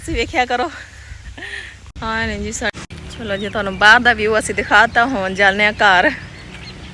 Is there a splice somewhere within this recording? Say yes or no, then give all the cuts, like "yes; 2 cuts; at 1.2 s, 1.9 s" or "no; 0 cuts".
yes; 1 cut; at 2.7 s